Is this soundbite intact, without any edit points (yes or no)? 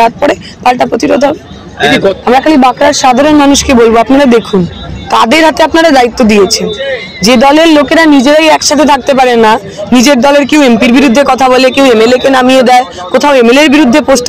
no